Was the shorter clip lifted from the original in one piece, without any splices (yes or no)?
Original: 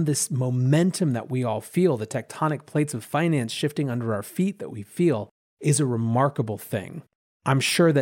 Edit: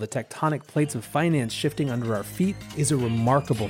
no